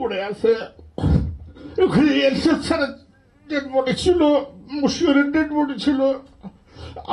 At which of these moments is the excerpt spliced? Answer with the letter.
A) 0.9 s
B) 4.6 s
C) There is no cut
C